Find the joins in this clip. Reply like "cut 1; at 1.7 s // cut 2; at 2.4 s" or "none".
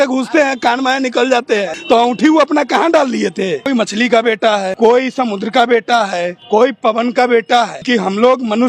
cut 1; at 1.7 s // cut 2; at 3.6 s // cut 3; at 4.7 s // cut 4; at 6.4 s // cut 5; at 7.9 s